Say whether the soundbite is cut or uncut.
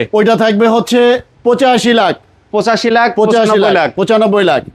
cut